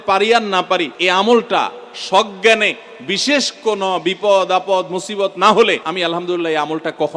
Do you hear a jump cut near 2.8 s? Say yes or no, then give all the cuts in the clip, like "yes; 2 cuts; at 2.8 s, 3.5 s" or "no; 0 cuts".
no; 2 cuts; at 0.9 s, 5.9 s